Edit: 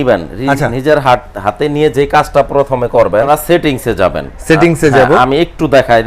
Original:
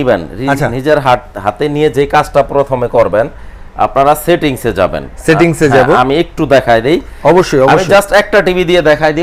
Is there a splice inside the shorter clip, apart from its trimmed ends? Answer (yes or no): yes